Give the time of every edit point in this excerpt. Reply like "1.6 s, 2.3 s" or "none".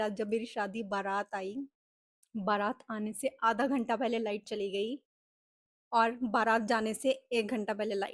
none